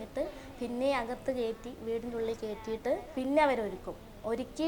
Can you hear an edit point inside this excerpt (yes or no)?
yes